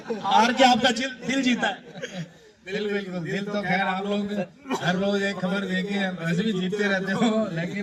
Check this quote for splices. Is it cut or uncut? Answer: uncut